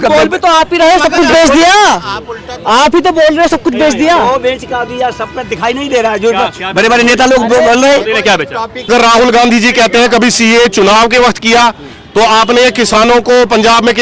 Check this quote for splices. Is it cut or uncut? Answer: cut